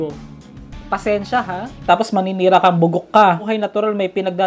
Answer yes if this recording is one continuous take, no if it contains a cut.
no